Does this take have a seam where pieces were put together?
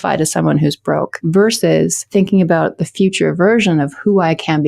yes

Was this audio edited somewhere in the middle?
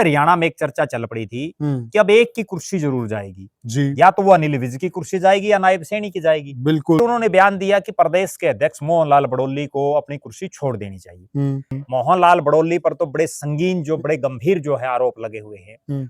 yes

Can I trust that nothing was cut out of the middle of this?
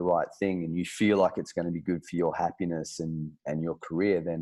yes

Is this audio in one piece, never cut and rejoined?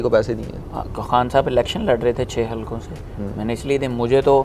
yes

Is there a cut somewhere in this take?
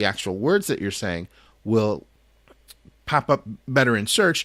no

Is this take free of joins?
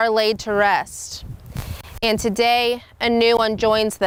yes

